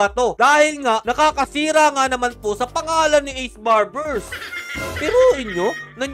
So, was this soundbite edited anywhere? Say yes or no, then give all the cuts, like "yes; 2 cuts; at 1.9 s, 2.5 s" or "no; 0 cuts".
no; 0 cuts